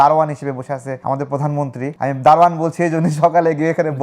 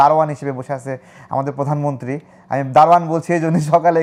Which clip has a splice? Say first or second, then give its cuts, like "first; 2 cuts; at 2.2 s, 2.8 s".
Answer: first; 2 cuts; at 0.9 s, 1.9 s